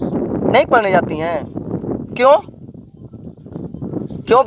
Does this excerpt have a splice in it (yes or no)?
no